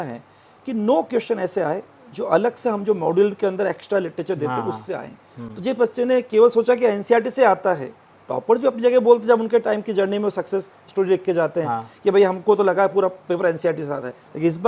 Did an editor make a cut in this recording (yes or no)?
no